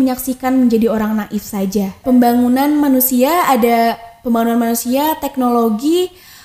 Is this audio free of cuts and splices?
no; 1 cut; at 2.0 s

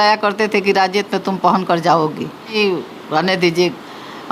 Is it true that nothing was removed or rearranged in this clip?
no; 1 cut; at 2.5 s

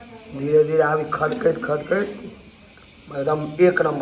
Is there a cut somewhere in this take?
no; 0 cuts

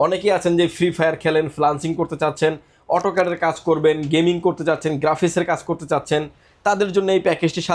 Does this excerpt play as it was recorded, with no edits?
yes; 0 cuts

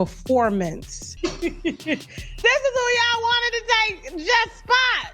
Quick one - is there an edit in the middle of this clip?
yes; 1 cut; at 1.1 s

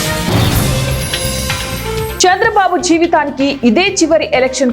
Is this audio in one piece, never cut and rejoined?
no; 1 cut; at 2.1 s

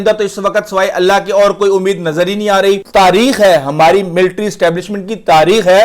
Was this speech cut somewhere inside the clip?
yes; 1 cut; at 2.8 s

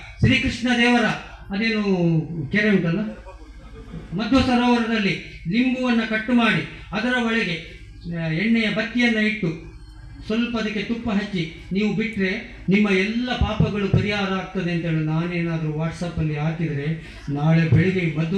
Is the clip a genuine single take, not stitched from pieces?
yes; 0 cuts

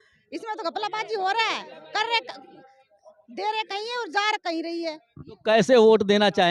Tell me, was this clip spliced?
no; 0 cuts

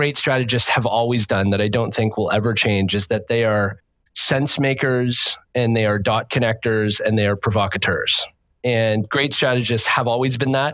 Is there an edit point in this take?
no; 0 cuts

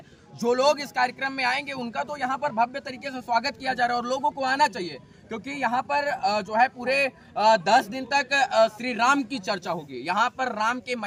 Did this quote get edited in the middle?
no; 0 cuts

